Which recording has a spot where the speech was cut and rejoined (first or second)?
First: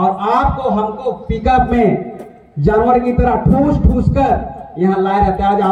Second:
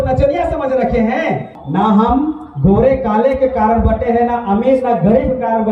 second